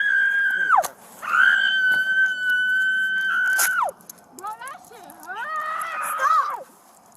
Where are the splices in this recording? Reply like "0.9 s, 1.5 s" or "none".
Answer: 1.5 s